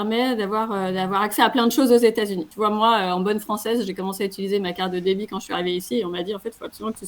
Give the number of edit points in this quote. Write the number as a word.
one